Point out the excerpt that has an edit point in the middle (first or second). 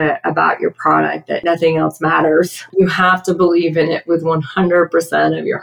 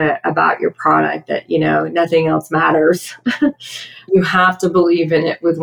first